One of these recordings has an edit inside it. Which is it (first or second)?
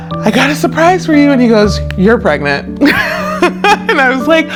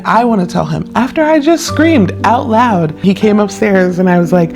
second